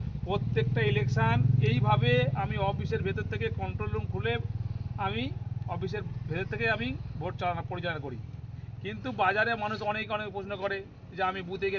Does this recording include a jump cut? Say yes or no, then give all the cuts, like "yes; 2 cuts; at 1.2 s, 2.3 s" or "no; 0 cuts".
no; 0 cuts